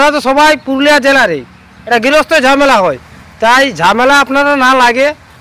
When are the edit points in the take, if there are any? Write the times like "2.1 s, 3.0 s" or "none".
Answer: 1.8 s